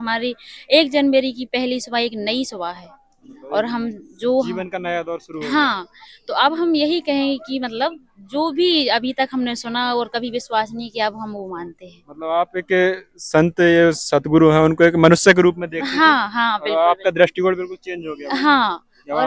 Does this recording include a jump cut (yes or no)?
no